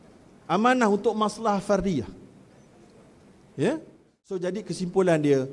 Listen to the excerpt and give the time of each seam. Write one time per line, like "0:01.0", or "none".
0:04.4